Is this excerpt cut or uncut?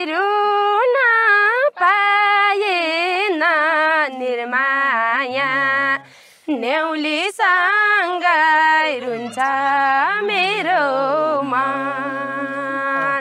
uncut